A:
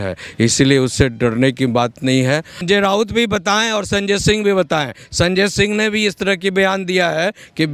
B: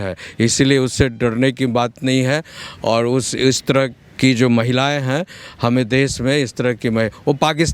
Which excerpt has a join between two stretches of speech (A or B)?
A